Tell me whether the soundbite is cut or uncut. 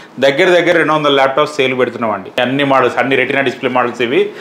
cut